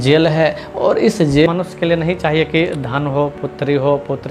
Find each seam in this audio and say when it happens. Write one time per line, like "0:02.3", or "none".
0:01.5